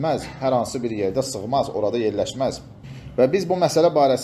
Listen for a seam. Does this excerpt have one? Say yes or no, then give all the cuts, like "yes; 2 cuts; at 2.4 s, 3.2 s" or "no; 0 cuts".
no; 0 cuts